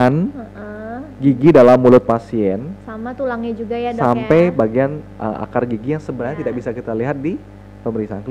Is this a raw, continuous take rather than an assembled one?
yes; 0 cuts

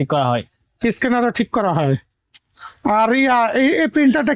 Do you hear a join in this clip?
no; 0 cuts

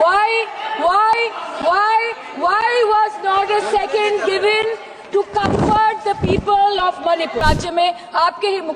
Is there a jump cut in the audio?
yes; 1 cut; at 7.4 s

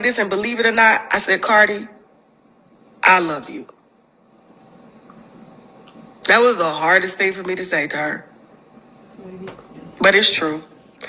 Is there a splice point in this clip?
no; 0 cuts

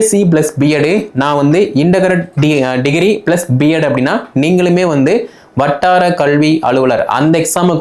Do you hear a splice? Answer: no; 0 cuts

